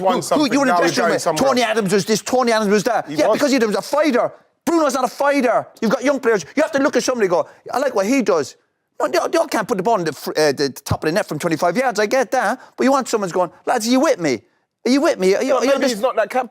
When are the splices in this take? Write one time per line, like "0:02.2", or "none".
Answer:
none